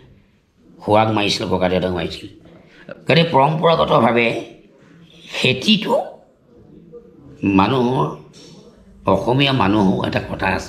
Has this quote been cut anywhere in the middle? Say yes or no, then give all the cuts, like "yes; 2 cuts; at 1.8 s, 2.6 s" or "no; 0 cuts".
no; 0 cuts